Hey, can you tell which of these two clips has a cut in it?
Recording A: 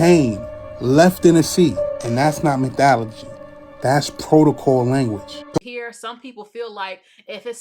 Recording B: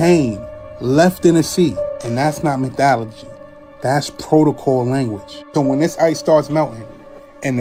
A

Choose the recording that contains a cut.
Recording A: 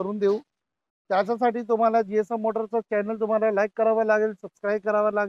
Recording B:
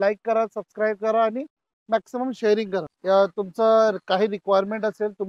B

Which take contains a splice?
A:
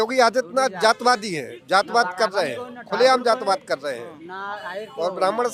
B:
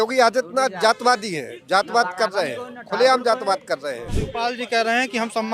B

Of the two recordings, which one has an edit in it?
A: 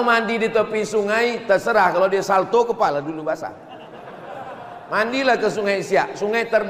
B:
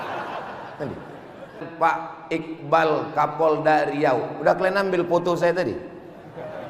B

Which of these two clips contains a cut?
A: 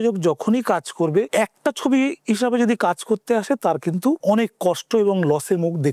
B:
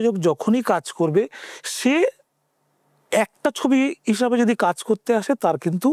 A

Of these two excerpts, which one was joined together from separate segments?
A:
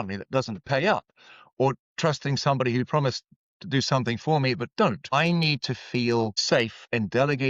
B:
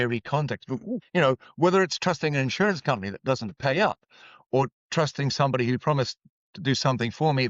B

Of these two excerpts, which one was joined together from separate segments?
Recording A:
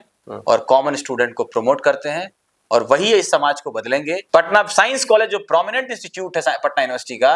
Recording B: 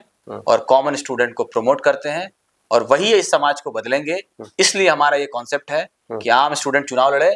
A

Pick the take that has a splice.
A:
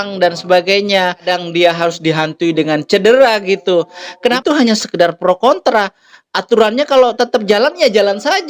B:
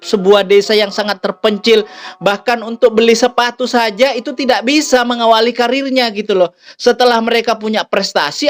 A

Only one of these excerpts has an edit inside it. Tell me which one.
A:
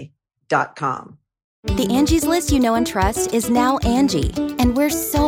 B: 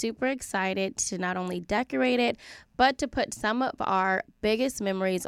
A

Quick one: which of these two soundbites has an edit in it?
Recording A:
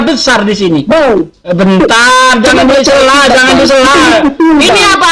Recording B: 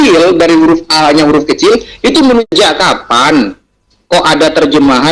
B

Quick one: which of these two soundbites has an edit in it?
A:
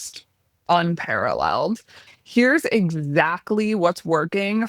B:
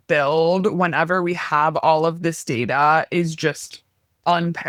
A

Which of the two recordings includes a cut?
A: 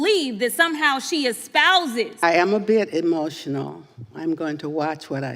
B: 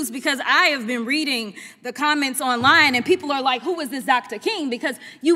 A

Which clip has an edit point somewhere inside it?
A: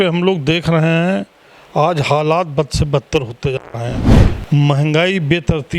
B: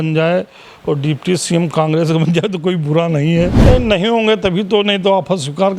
B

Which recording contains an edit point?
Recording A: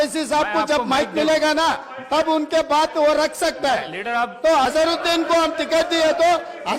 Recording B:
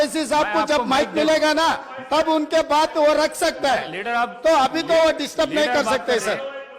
A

